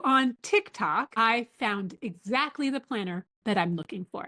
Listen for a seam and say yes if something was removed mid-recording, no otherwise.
no